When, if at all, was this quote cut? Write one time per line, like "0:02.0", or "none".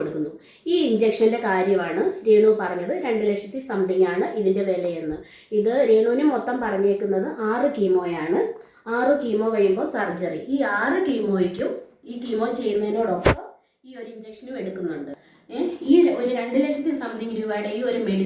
0:15.3

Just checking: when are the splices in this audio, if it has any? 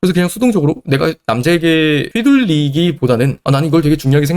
0:03.4

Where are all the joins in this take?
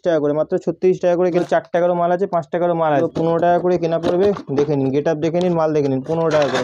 0:01.4
0:03.0

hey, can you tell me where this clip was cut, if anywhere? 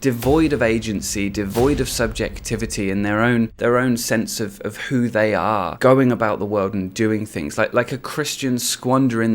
0:03.5
0:05.7

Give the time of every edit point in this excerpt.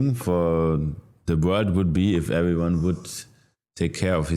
none

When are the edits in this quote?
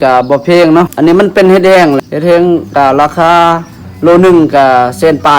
0:00.9
0:02.0

